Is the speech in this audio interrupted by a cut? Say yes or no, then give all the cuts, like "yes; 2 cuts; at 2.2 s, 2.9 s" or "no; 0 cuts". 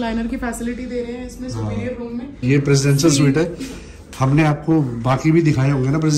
yes; 1 cut; at 2.4 s